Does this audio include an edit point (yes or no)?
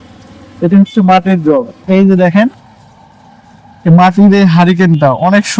yes